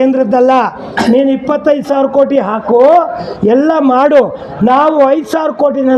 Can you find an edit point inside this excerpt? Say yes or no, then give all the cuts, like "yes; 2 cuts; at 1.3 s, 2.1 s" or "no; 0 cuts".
no; 0 cuts